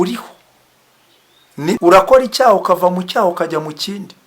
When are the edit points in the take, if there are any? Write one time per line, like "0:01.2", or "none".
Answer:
0:01.8